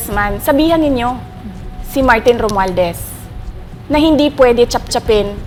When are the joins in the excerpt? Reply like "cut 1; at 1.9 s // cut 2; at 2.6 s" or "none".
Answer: none

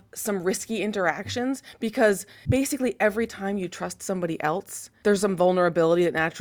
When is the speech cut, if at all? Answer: cut 1; at 2.3 s // cut 2; at 4.8 s

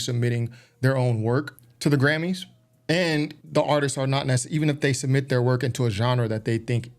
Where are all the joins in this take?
cut 1; at 1.6 s // cut 2; at 3.4 s

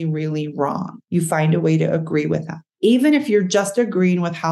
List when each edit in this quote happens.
cut 1; at 0.9 s // cut 2; at 2.6 s

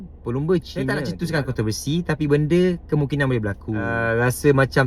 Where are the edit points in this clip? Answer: cut 1; at 1.1 s // cut 2; at 4.0 s

